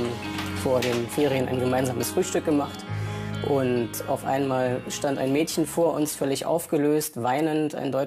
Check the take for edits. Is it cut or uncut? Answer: uncut